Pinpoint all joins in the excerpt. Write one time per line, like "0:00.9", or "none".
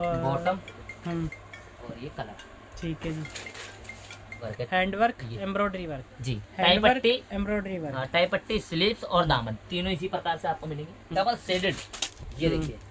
0:04.5
0:11.1